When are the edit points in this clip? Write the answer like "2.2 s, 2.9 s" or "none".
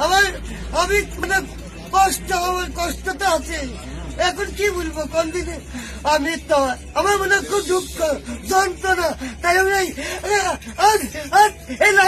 1.2 s